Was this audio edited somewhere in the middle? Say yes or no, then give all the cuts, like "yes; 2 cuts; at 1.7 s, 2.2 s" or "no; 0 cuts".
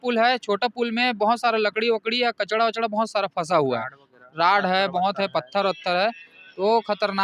no; 0 cuts